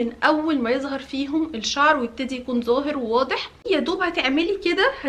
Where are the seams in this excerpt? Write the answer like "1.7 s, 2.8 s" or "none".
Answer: 3.6 s